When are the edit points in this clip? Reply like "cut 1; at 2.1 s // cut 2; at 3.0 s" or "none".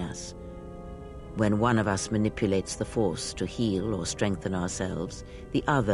none